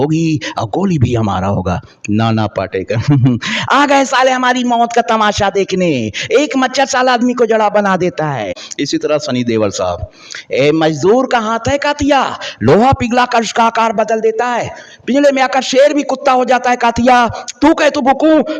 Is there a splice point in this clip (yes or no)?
yes